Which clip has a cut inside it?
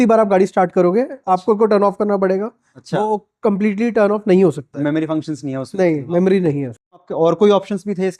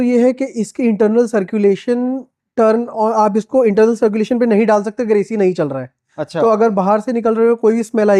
first; 1 cut; at 7.1 s

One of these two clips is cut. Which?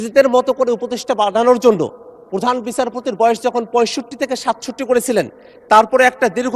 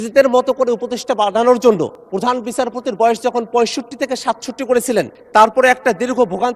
second; 2 cuts; at 2.0 s, 5.2 s

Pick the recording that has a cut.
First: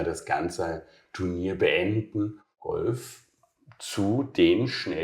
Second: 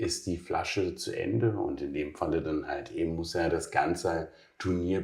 first; 1 cut; at 2.6 s

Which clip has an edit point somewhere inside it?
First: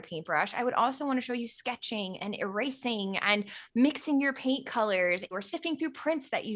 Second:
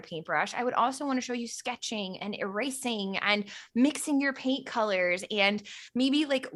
first; 1 cut; at 5.3 s

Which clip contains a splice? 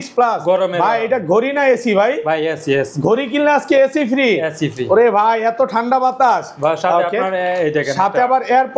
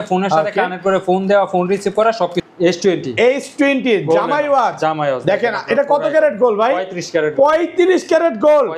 second; 1 cut; at 2.4 s

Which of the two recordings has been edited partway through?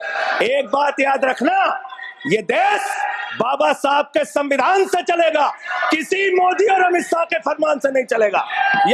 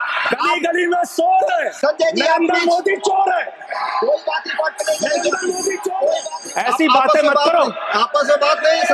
second; 1 cut; at 6.4 s

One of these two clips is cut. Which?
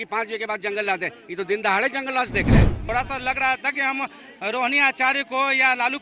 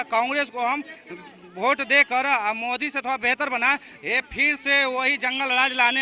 first; 1 cut; at 2.8 s

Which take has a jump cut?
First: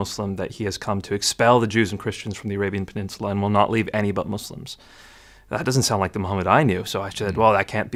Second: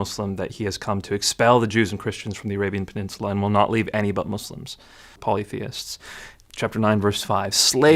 second; 1 cut; at 5.2 s

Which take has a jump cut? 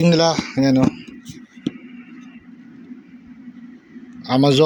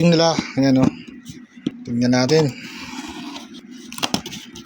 second; 2 cuts; at 1.9 s, 3.6 s

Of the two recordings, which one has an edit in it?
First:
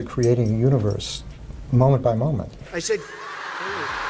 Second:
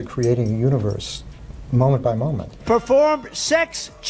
first; 1 cut; at 2.6 s

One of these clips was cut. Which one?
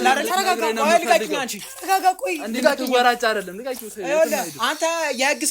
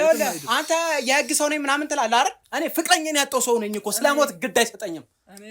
second; 1 cut; at 2.4 s

